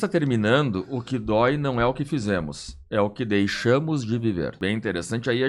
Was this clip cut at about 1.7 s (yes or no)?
no